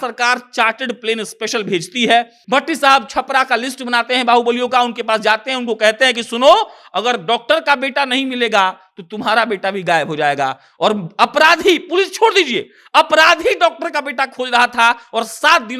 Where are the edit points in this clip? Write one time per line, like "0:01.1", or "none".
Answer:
0:02.4